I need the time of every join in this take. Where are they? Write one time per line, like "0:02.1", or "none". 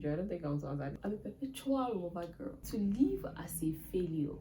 0:01.0
0:02.6